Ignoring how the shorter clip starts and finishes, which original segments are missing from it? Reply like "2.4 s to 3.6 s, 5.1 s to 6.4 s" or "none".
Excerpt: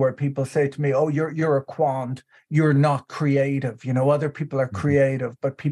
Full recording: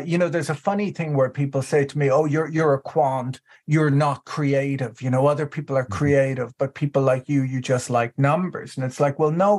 none